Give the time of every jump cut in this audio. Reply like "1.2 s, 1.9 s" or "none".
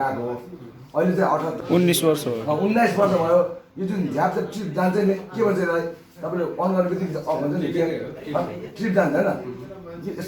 1.6 s